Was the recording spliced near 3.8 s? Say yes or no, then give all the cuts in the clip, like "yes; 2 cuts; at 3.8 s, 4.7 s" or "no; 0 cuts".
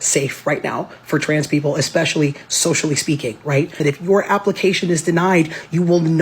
yes; 1 cut; at 3.8 s